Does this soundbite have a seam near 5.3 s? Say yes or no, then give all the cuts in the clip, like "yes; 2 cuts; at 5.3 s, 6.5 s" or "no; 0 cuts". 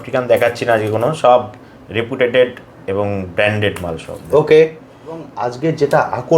yes; 1 cut; at 5.3 s